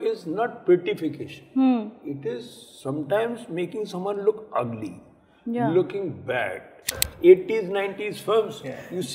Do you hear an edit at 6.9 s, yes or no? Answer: yes